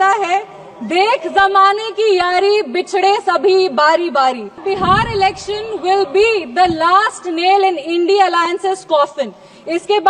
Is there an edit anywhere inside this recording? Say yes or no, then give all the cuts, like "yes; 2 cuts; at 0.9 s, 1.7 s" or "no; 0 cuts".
yes; 1 cut; at 4.6 s